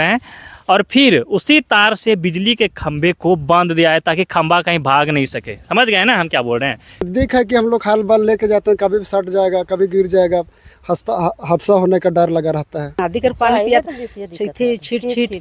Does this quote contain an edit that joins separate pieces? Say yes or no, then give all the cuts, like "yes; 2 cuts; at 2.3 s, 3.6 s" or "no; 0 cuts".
yes; 2 cuts; at 7.1 s, 13.0 s